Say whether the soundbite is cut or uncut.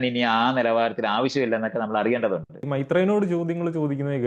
cut